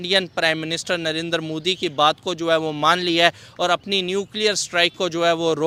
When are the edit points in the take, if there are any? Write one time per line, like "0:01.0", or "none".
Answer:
none